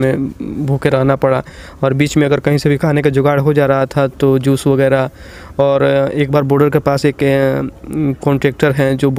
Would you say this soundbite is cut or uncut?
uncut